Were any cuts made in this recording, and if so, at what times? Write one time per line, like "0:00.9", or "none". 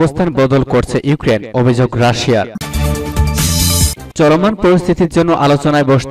0:02.6
0:04.0